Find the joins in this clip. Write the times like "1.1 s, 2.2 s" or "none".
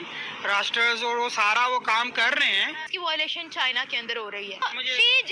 2.9 s